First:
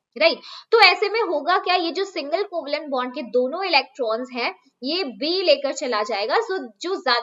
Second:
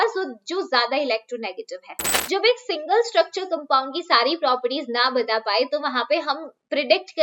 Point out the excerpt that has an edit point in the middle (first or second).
second